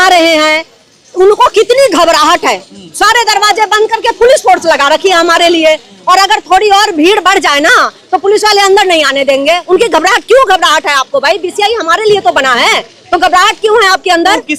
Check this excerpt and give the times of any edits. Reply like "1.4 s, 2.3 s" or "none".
none